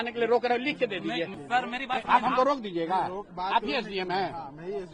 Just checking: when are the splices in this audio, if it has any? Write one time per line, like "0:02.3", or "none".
0:01.4